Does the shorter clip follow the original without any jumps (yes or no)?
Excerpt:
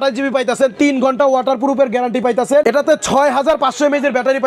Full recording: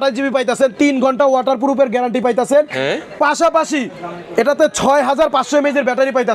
no